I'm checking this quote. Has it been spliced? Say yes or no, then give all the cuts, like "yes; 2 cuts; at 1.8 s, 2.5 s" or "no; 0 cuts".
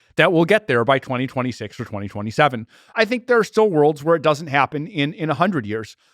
yes; 1 cut; at 2.8 s